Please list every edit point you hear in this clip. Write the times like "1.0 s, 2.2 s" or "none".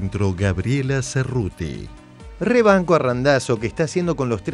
none